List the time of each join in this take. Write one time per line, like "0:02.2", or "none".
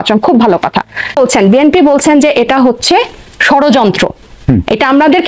0:01.2